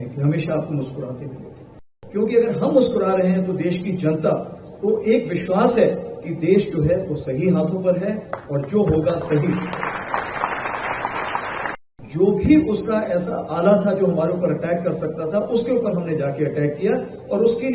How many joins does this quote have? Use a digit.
2